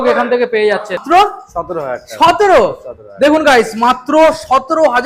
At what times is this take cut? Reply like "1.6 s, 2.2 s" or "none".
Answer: 1.0 s